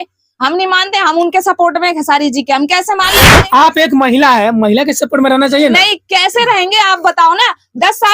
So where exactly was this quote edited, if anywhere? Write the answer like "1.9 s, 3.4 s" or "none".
3.2 s